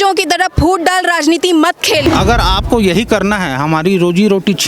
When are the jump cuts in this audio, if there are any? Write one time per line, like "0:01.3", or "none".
0:02.1